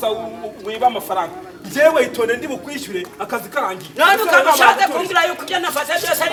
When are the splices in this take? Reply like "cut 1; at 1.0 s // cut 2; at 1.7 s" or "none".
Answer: none